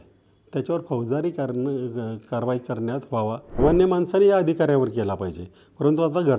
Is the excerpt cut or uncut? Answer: cut